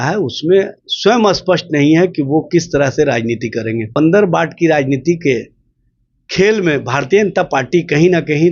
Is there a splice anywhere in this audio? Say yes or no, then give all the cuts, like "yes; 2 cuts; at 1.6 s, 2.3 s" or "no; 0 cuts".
yes; 1 cut; at 3.9 s